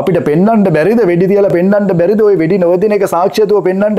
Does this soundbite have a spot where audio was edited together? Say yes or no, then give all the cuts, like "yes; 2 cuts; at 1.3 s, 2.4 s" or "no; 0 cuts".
no; 0 cuts